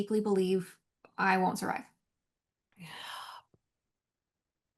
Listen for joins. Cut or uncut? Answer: uncut